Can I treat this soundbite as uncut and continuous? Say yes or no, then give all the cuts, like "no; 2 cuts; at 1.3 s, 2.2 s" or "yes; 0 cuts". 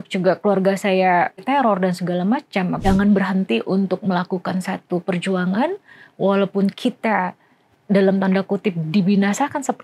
no; 2 cuts; at 1.4 s, 2.8 s